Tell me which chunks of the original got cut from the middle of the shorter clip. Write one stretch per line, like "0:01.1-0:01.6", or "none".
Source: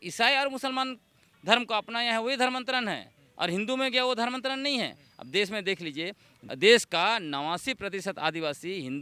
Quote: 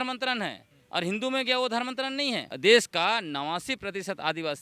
0:04.9-0:06.5